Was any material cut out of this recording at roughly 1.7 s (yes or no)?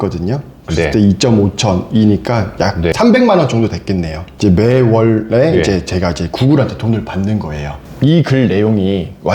no